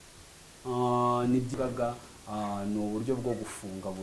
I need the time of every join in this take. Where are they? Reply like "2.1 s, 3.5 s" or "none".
1.5 s